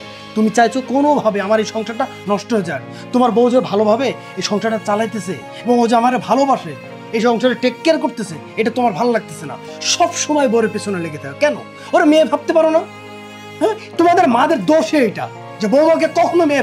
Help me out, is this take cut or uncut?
uncut